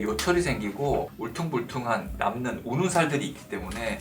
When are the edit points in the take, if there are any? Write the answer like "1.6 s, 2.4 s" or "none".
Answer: none